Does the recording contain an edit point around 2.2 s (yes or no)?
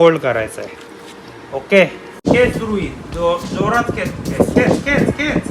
yes